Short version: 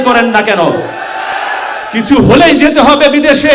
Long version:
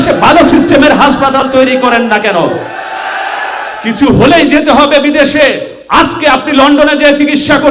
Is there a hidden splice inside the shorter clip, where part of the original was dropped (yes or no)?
yes